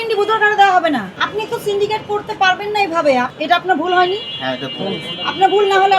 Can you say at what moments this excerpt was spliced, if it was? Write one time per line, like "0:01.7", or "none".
0:01.2
0:03.3